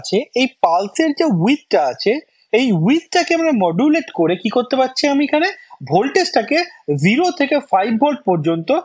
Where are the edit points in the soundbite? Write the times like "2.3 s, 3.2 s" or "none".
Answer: none

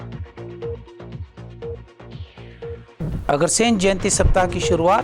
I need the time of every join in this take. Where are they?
2.9 s

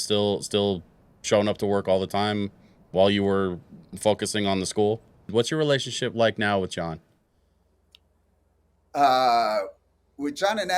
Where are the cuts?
5.3 s

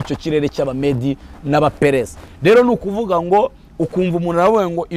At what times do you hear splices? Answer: none

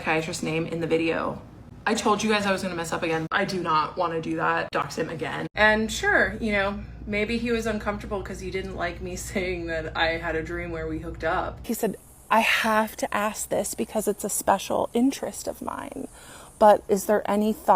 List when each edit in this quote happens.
3.3 s, 5.5 s, 11.6 s

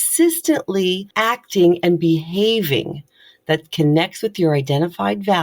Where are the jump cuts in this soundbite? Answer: 1.1 s

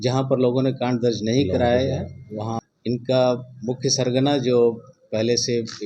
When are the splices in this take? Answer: 2.6 s

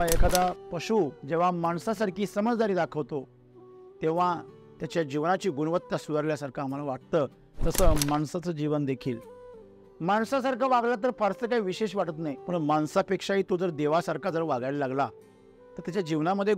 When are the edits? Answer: 1.2 s, 12.4 s

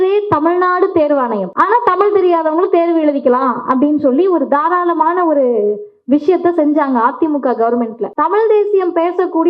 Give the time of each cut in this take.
1.5 s, 8.0 s

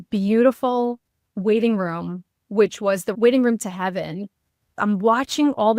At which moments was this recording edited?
3.1 s, 4.6 s

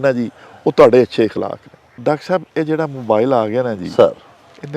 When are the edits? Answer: 1.9 s

